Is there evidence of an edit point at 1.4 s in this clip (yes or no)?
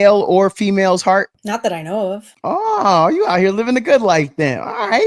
yes